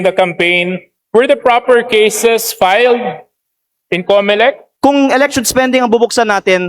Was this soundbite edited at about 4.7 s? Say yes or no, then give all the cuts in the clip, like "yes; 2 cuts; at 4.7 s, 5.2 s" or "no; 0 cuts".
yes; 1 cut; at 4.7 s